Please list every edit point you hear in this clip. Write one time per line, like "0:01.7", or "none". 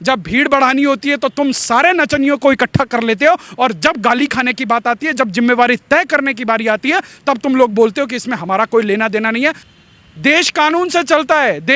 0:09.7